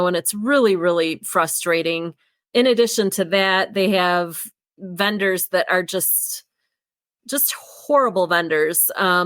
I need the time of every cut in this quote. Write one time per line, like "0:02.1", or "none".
0:02.5